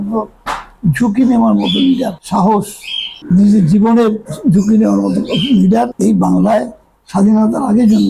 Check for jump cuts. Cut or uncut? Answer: uncut